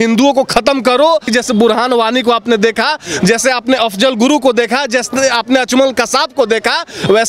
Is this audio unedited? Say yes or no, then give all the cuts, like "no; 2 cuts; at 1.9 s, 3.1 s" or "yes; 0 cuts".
no; 1 cut; at 1.3 s